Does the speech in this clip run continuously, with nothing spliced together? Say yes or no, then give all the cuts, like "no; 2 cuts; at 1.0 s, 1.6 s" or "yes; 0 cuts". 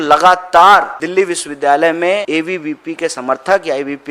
no; 2 cuts; at 1.0 s, 2.2 s